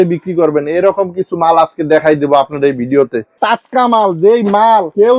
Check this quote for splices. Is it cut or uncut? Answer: cut